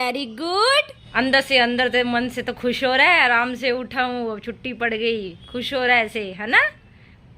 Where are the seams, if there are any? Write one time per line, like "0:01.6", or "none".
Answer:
0:01.0

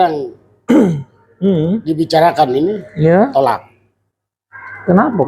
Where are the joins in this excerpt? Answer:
none

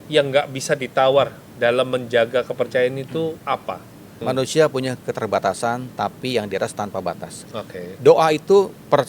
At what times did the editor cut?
0:03.8

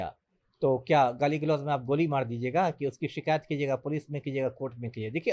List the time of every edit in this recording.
none

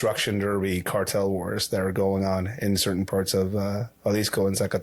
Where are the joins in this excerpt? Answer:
none

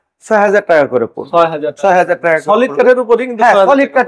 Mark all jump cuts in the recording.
none

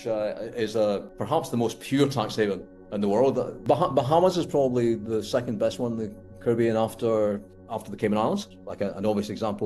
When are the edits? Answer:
0:03.5
0:07.5
0:08.6

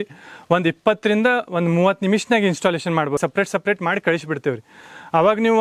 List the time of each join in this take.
0:03.2

